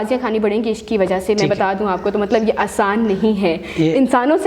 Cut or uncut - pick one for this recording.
uncut